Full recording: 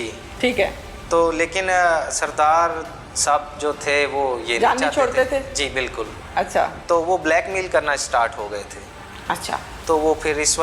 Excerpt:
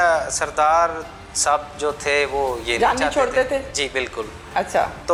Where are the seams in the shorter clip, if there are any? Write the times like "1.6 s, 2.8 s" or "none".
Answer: none